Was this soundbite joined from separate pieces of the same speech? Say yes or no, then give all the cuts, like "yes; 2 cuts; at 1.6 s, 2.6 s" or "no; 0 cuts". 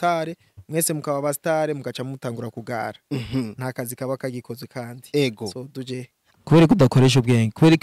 yes; 1 cut; at 6.1 s